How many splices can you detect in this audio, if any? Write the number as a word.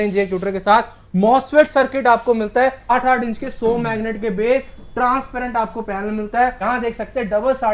two